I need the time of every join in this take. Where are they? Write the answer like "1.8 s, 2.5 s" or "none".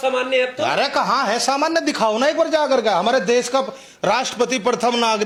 none